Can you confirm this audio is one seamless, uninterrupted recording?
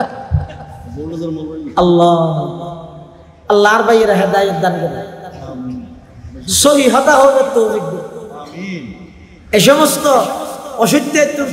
yes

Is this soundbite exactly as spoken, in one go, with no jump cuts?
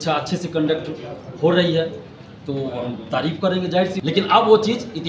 no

